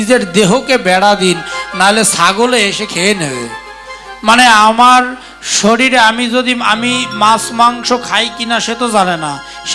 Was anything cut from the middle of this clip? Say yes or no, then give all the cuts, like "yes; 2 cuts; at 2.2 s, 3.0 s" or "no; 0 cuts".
no; 0 cuts